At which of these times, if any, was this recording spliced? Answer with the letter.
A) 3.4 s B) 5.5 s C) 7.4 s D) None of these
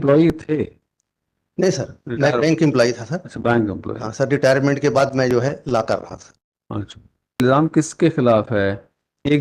C